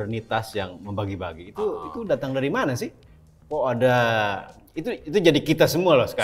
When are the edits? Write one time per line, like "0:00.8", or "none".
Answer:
none